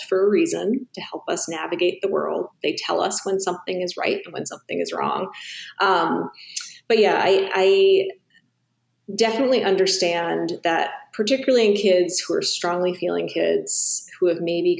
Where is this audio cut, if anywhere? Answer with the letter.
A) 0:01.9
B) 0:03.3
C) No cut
C